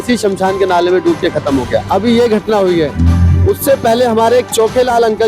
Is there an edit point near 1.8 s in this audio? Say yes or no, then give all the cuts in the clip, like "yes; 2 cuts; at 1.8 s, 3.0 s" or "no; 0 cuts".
yes; 1 cut; at 1.8 s